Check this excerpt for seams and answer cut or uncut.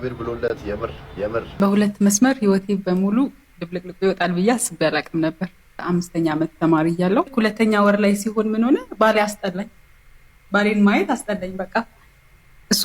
cut